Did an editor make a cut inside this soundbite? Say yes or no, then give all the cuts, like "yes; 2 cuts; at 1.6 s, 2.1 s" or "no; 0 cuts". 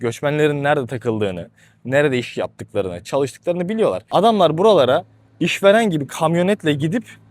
yes; 1 cut; at 4.0 s